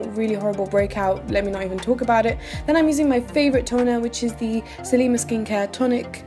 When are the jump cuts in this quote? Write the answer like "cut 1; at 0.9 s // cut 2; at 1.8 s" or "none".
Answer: cut 1; at 1.7 s